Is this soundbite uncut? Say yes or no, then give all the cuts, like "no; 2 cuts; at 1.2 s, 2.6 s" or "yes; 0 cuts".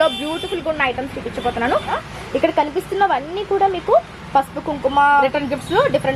no; 2 cuts; at 2.0 s, 5.2 s